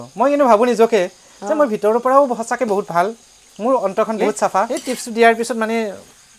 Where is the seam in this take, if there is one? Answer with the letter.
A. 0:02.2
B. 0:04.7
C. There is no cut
B